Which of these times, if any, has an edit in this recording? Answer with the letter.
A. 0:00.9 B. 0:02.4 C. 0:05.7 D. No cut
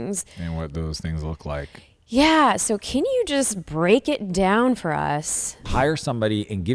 C